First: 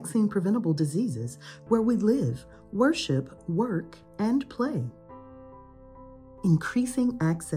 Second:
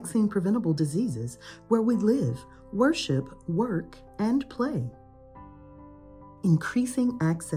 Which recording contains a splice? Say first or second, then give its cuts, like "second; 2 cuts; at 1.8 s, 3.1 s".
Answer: first; 2 cuts; at 5.0 s, 6.3 s